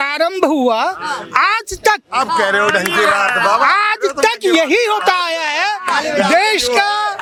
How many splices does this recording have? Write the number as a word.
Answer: zero